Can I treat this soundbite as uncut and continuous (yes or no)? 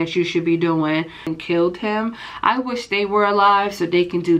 no